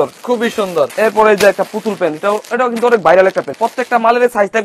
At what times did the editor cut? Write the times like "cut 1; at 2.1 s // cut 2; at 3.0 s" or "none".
cut 1; at 0.9 s // cut 2; at 3.5 s

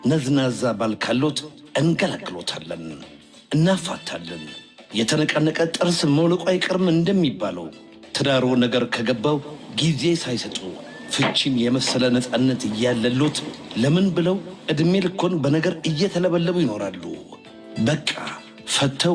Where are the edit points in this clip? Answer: none

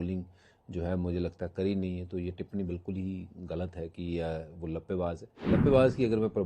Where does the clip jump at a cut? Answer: cut 1; at 5.3 s

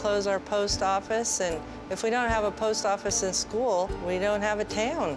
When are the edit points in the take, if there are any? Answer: cut 1; at 4.0 s

